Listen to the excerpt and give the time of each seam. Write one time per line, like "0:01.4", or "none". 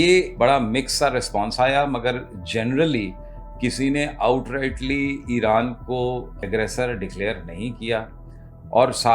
0:06.3